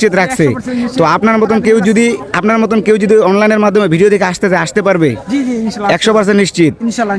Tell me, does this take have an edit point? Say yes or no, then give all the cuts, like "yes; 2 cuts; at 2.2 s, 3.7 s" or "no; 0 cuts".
no; 0 cuts